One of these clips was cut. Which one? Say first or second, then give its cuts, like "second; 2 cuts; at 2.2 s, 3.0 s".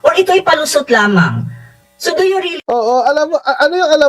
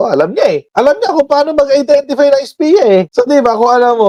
first; 1 cut; at 2.6 s